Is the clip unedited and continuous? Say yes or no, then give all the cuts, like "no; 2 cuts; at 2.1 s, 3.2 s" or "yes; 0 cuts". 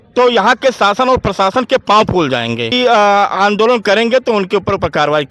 no; 1 cut; at 2.7 s